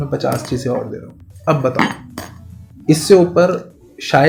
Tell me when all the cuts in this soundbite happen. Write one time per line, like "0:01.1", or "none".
none